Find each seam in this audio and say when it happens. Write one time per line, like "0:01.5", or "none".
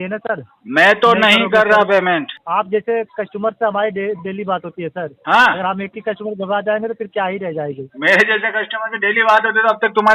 0:02.4